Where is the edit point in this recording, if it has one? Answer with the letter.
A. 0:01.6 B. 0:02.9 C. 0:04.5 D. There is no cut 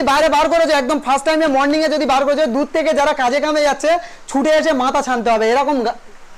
D